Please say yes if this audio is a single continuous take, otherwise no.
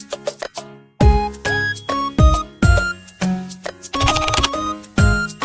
yes